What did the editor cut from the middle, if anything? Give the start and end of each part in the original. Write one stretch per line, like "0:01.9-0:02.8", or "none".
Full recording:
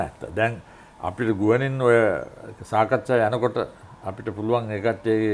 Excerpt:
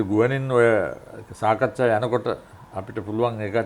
none